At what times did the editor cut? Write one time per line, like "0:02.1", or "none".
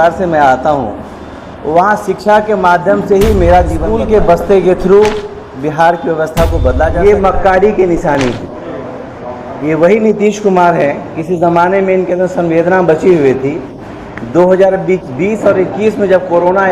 0:03.8
0:06.9